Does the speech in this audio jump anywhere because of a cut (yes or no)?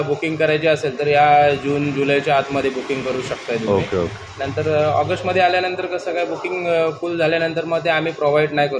no